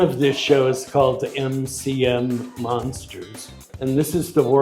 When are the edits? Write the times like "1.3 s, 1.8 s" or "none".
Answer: 3.7 s